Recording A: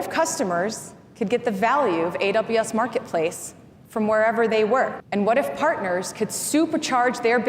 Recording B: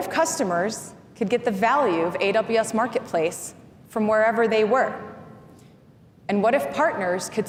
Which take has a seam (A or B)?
A